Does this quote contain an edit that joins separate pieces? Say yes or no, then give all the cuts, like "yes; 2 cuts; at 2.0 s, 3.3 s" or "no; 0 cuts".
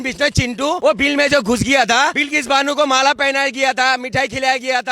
yes; 2 cuts; at 0.8 s, 2.2 s